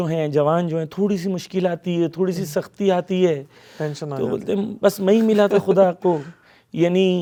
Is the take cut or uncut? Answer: uncut